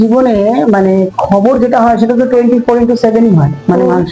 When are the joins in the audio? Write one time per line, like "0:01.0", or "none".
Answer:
none